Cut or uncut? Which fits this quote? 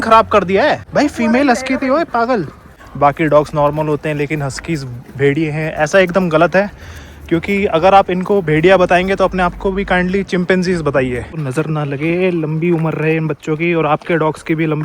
cut